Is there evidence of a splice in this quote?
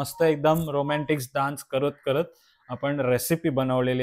no; 0 cuts

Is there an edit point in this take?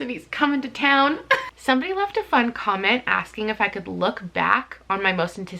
yes; 1 cut; at 1.5 s

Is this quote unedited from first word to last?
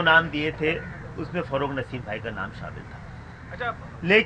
yes; 0 cuts

